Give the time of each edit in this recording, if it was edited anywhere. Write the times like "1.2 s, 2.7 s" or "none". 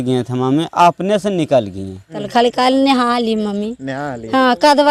2.2 s